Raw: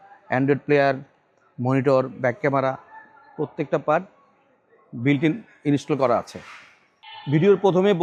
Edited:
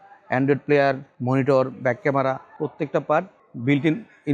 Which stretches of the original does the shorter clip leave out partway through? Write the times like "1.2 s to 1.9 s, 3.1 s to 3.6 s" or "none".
1.1 s to 1.5 s, 2.9 s to 3.3 s, 4.2 s to 4.8 s